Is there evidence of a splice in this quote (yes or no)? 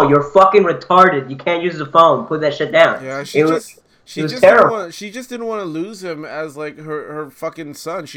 no